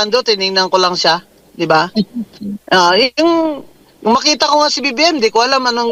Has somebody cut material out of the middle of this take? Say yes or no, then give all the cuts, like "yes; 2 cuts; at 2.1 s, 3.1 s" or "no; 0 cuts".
no; 0 cuts